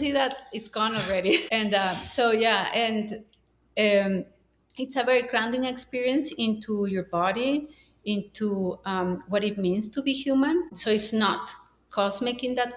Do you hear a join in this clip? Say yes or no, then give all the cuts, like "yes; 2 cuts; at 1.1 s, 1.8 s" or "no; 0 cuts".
yes; 2 cuts; at 1.4 s, 10.8 s